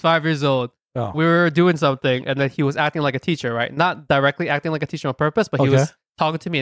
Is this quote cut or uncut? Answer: uncut